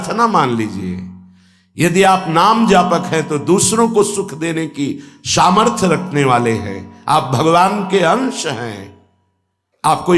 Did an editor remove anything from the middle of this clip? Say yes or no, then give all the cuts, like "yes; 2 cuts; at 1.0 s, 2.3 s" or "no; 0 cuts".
no; 0 cuts